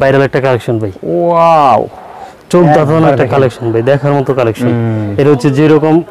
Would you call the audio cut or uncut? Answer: uncut